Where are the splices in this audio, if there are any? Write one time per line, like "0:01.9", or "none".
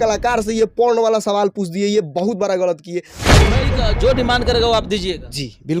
0:03.4